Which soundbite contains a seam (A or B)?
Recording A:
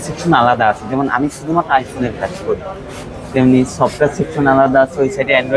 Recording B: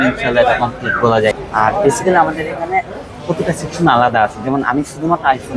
B